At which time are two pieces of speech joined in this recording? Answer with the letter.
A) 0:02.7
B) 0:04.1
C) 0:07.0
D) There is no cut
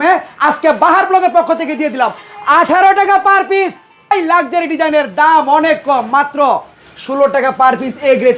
B